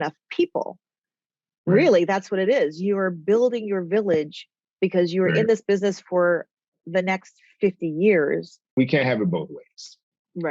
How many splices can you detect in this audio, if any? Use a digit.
1